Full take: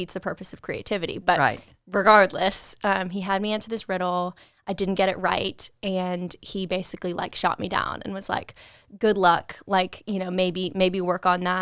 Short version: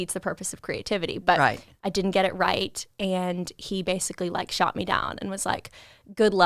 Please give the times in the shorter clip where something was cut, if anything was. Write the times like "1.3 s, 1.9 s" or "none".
1.7 s